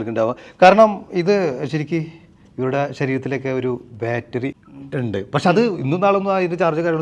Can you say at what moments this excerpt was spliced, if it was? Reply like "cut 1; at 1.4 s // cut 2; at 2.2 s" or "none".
cut 1; at 4.5 s

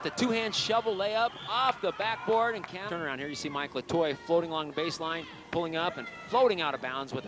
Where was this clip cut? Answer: cut 1; at 2.9 s

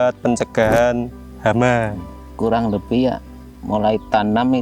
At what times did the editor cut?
cut 1; at 2.2 s

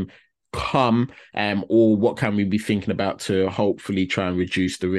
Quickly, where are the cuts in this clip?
none

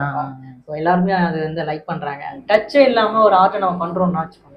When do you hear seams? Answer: cut 1; at 2.3 s

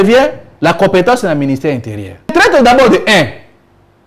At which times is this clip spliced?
cut 1; at 2.3 s

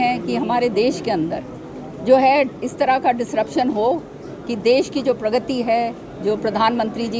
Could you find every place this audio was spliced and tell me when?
none

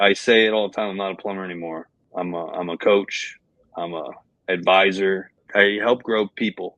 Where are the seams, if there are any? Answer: cut 1; at 1.9 s // cut 2; at 5.3 s

